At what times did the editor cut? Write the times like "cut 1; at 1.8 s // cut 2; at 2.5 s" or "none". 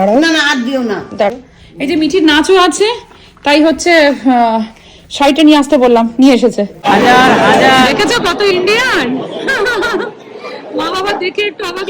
cut 1; at 1.3 s // cut 2; at 6.7 s